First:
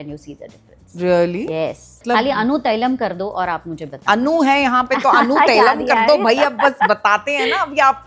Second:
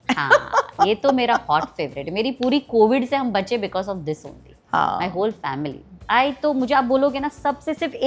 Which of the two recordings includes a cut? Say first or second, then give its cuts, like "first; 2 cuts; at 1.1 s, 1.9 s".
first; 1 cut; at 2.0 s